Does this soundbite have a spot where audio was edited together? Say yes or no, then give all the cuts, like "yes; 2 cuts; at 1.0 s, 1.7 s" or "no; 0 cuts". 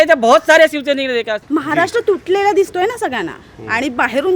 yes; 1 cut; at 1.4 s